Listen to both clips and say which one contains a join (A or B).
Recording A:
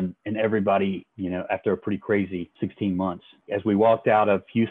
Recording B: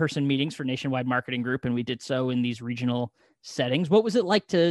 A